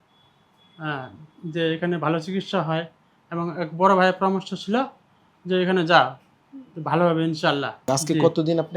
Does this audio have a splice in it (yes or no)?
yes